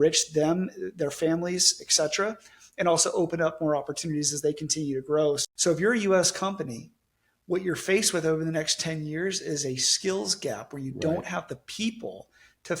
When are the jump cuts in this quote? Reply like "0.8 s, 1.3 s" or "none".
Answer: 5.4 s